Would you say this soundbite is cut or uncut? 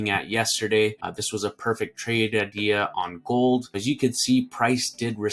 cut